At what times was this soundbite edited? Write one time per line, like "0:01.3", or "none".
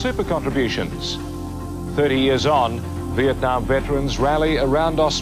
0:02.0